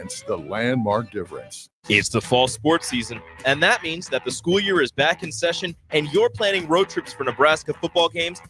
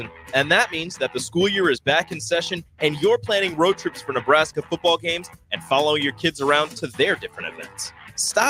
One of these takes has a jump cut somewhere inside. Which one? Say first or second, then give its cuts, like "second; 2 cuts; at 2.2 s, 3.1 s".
first; 1 cut; at 1.7 s